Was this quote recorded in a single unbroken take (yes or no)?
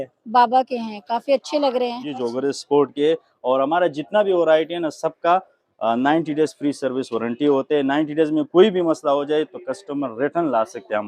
no